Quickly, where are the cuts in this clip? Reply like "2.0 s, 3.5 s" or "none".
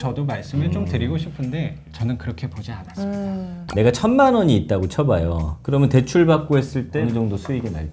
1.9 s, 3.6 s, 7.0 s